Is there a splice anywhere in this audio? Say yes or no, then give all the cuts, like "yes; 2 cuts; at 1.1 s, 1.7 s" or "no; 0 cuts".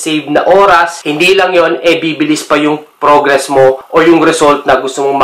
no; 0 cuts